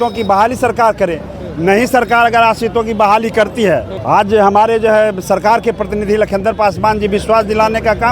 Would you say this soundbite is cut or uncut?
cut